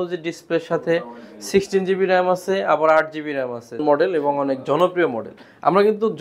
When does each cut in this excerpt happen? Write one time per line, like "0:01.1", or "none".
0:03.8